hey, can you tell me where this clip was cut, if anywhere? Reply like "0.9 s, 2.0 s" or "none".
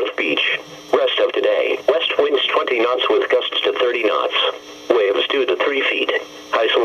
4.0 s, 5.2 s